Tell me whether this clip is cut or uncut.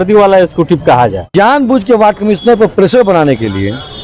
cut